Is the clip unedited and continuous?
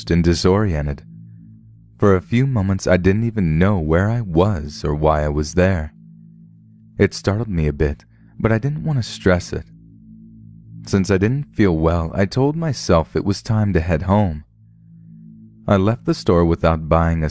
no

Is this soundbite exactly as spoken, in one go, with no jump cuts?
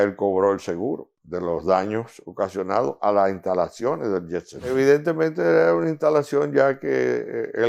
no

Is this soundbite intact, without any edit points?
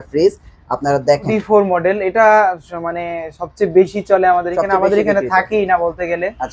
no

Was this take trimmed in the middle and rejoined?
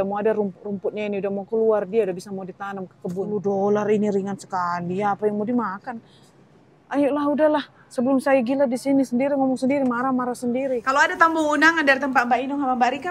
yes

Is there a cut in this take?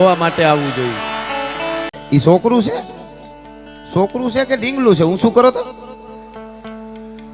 yes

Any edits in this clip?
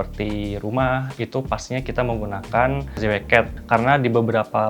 yes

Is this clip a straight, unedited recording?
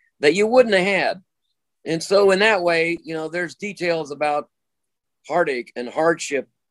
yes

